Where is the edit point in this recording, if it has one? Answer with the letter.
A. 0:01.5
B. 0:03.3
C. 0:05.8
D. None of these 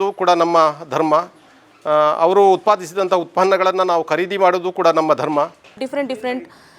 C